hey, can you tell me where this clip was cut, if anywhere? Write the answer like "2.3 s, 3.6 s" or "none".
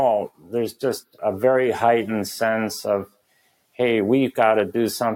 1.2 s